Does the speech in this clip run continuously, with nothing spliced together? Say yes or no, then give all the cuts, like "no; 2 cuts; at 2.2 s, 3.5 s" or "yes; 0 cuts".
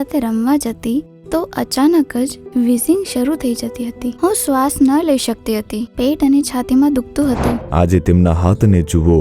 no; 1 cut; at 7.6 s